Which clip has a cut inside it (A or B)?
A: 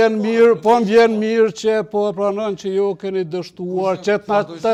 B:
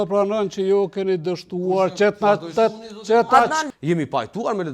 B